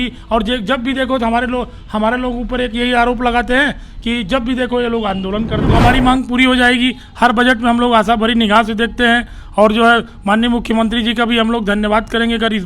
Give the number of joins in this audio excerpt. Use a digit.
1